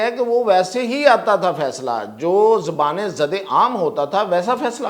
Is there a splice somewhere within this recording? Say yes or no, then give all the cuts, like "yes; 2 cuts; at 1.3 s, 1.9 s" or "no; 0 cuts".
no; 0 cuts